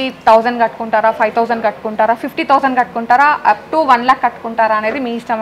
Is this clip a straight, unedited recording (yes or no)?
yes